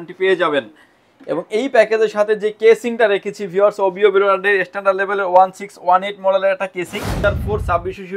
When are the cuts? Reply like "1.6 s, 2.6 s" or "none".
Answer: 7.2 s

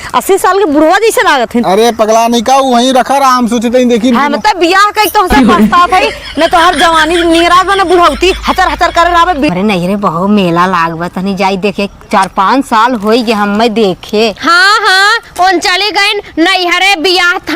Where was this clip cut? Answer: 9.5 s

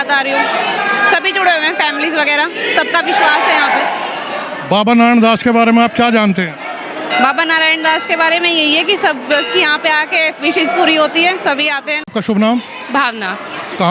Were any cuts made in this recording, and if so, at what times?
11.9 s

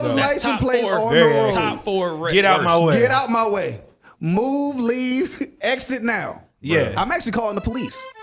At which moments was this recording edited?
none

